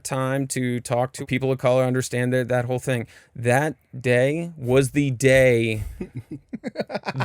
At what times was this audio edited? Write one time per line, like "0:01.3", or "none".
0:01.2